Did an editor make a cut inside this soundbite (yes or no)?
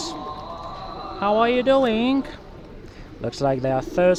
no